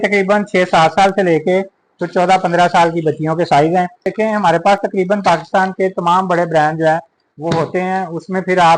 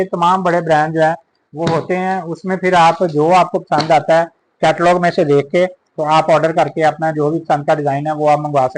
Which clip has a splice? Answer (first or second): first